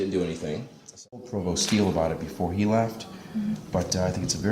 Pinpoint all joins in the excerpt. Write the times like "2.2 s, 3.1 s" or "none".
1.0 s